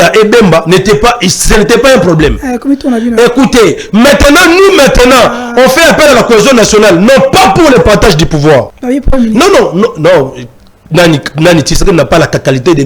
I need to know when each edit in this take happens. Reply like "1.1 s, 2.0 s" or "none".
8.8 s